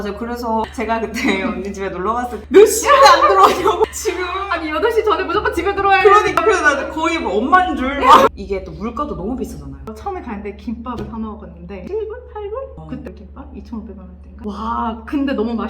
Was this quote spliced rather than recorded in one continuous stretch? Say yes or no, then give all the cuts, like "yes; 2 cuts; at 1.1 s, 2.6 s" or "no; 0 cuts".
yes; 3 cuts; at 8.3 s, 9.8 s, 11.8 s